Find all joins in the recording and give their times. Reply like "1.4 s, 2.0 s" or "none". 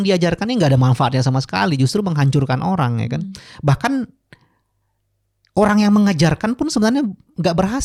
none